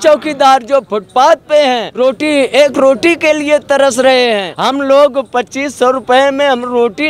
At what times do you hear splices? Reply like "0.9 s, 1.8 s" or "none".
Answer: 1.9 s, 4.5 s